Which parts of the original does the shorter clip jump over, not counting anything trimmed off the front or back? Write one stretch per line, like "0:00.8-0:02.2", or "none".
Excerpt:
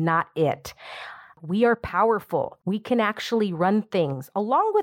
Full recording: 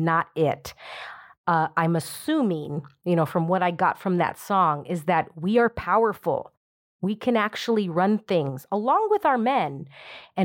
0:01.4-0:05.3
0:06.5-0:06.9